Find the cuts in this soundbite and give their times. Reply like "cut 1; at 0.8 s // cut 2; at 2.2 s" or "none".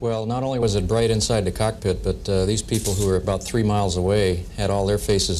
cut 1; at 3.7 s